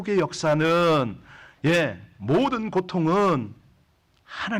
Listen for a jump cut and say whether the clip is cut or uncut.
uncut